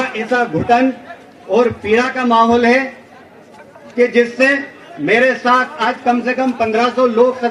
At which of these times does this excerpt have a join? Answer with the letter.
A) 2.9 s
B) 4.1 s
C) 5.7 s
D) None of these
D